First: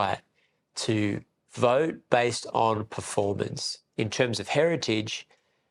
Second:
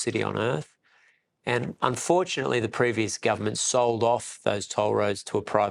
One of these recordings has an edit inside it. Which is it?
first; 1 cut; at 3.9 s

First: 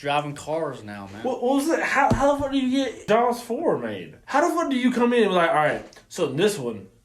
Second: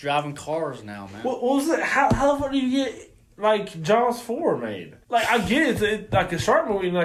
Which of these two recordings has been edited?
first; 2 cuts; at 3.0 s, 4.2 s

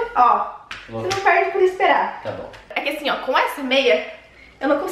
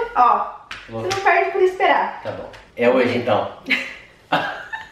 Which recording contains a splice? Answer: first; 1 cut; at 2.7 s

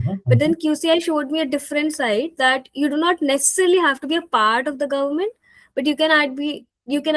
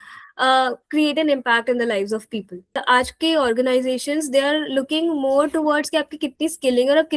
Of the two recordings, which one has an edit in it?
second; 1 cut; at 2.8 s

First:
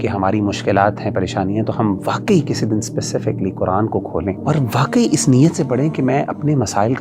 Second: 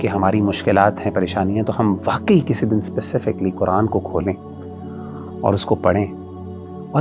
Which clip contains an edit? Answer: first; 1 cut; at 4.4 s

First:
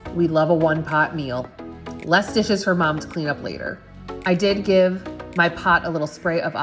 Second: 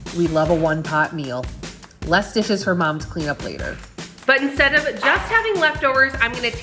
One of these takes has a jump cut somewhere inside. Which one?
second; 1 cut; at 4.2 s

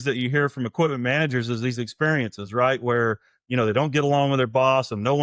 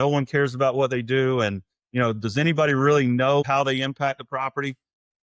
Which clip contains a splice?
second; 1 cut; at 3.4 s

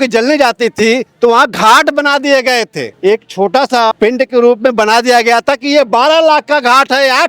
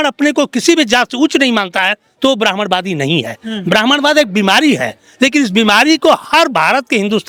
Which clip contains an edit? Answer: first; 2 cuts; at 2.9 s, 3.9 s

